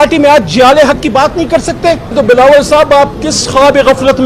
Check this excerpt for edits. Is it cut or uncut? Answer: cut